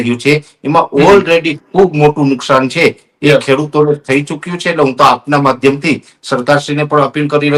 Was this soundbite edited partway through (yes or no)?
no